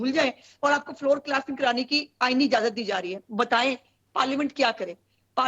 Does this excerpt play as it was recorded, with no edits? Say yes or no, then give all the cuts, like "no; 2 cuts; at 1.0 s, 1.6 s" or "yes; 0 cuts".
no; 1 cut; at 3.2 s